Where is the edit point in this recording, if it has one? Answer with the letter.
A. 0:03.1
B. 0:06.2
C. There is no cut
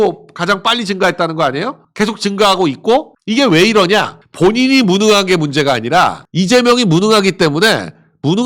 B